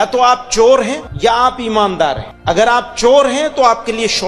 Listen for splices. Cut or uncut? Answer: cut